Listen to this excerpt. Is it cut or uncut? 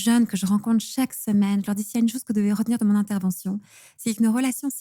uncut